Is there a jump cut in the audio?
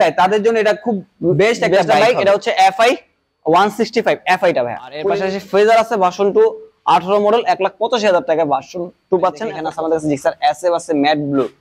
yes; 2 cuts; at 5.1 s, 9.7 s

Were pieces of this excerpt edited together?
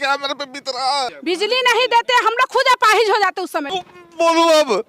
yes; 2 cuts; at 1.1 s, 3.8 s

